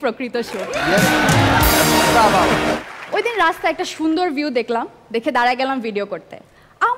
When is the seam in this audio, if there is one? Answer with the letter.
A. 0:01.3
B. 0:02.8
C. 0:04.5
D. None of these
B